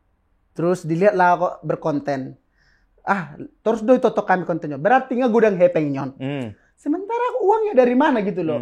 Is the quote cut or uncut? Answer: uncut